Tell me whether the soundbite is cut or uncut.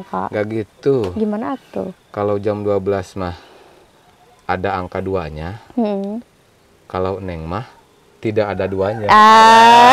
uncut